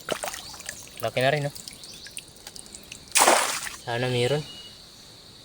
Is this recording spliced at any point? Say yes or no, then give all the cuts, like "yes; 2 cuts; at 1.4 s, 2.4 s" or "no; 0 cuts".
yes; 1 cut; at 3.7 s